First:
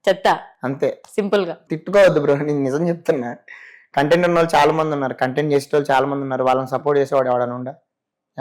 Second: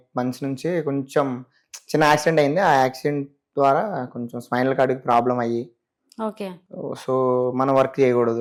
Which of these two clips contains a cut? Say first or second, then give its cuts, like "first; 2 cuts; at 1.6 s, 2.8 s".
first; 1 cut; at 1.6 s